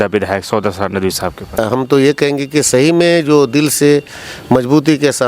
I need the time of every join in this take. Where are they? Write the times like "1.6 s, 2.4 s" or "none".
1.6 s